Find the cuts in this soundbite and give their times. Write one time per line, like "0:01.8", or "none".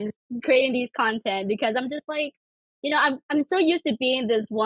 none